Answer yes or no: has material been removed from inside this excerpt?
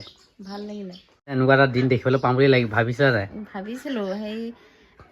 yes